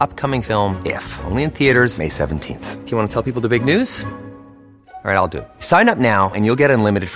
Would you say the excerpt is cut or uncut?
uncut